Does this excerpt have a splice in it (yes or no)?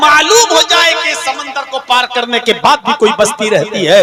no